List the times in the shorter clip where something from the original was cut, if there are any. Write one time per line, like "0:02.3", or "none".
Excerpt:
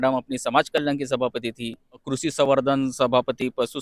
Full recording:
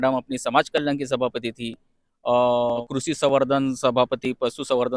0:02.1